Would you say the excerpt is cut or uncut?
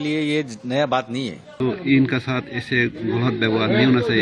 cut